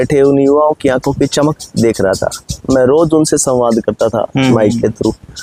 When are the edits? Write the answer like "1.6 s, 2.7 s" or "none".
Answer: none